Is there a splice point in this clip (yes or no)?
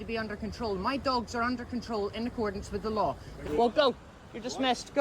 yes